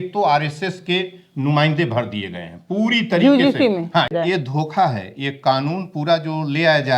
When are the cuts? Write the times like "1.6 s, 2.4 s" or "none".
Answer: 4.1 s